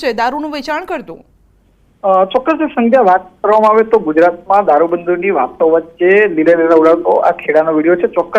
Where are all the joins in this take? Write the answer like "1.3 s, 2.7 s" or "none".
4.6 s